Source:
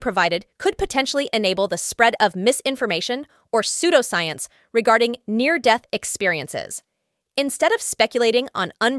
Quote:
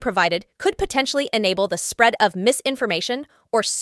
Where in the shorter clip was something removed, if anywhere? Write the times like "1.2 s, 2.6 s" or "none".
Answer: none